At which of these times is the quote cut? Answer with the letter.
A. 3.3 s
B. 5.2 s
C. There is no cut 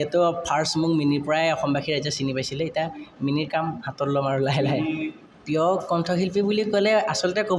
B